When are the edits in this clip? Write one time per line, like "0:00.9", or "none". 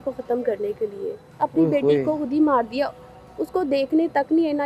0:01.2
0:03.2